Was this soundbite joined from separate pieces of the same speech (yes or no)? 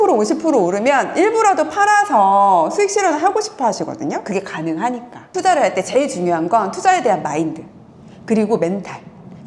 yes